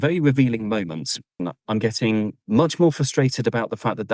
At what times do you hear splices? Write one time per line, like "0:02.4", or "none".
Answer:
0:01.4
0:02.4